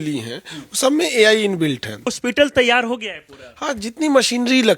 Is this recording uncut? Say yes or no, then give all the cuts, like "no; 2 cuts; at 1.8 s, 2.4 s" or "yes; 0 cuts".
no; 1 cut; at 2.1 s